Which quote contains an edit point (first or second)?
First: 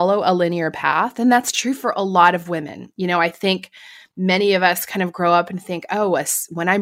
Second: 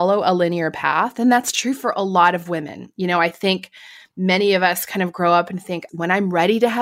second